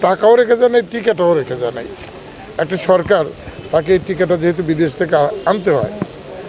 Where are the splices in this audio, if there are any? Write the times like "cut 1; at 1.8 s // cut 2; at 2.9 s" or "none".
none